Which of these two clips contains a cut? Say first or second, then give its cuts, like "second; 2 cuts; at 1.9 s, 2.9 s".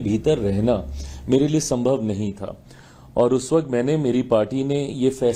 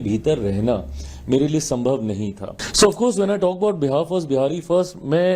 second; 1 cut; at 2.6 s